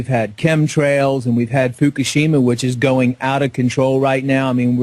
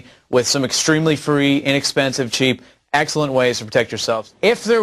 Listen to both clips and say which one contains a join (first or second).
first